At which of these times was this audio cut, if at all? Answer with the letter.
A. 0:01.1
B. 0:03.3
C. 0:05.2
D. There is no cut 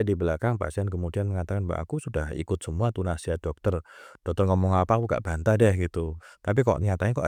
D